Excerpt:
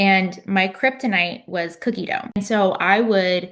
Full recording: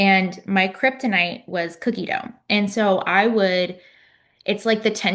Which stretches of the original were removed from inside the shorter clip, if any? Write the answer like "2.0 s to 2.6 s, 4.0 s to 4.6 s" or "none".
2.4 s to 2.6 s